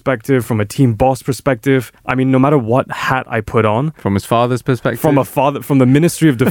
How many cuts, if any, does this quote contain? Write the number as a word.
zero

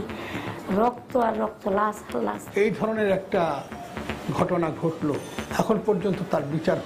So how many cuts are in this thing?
two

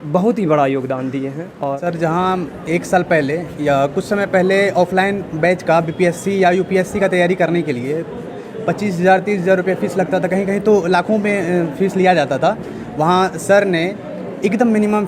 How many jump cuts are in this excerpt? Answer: one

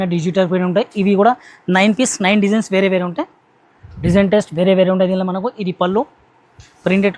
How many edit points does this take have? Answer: zero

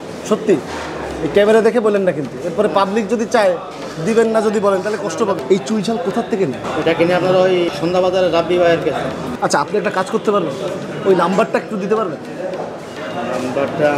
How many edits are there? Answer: three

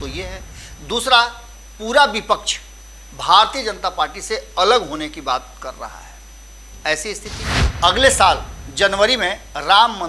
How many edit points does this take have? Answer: one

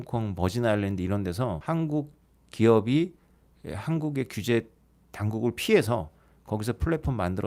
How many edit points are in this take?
one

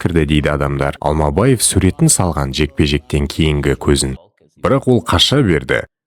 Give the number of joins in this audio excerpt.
one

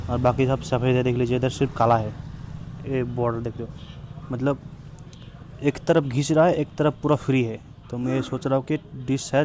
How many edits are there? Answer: zero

